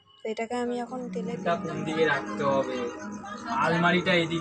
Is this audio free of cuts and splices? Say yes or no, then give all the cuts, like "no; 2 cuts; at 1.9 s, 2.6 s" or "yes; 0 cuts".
no; 1 cut; at 1.2 s